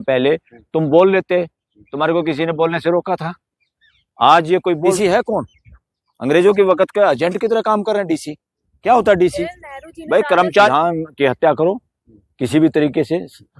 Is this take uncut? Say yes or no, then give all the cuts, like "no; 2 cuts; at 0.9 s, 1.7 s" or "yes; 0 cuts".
no; 2 cuts; at 4.9 s, 10.7 s